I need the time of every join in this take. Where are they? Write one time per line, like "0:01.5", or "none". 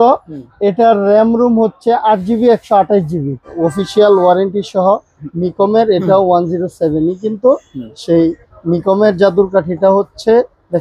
0:03.4